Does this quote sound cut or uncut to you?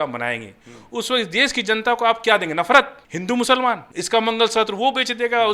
cut